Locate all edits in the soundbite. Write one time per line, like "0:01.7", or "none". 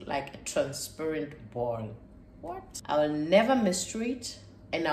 0:02.7